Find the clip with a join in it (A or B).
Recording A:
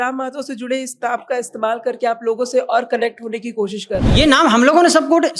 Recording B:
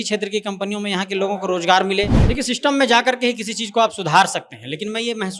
B